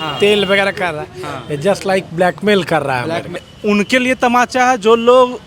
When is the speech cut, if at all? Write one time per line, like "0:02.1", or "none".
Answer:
0:03.5